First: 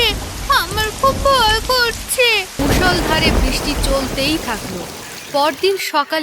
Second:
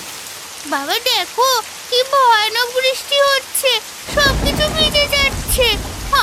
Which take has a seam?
first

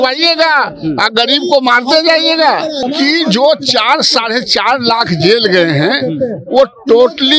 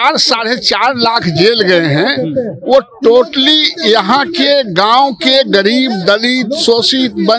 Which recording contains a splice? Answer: first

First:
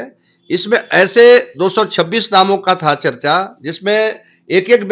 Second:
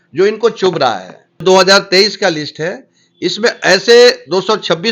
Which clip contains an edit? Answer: second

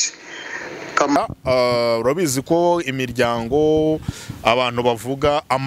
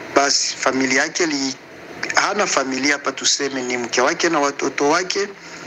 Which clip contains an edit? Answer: first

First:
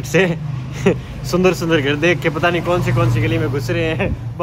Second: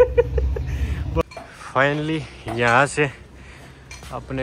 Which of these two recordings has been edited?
second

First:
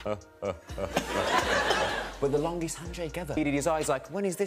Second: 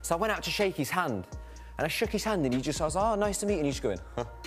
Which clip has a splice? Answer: first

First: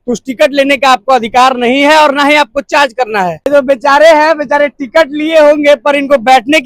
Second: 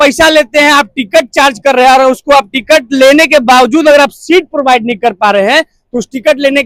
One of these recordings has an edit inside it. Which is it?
first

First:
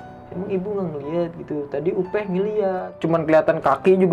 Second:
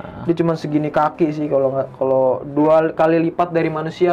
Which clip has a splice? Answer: first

